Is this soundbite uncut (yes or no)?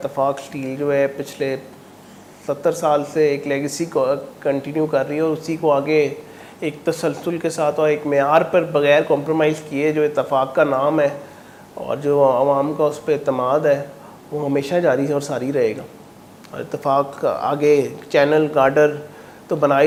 yes